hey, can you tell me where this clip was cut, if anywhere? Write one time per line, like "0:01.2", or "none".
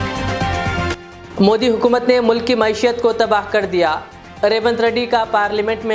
0:01.0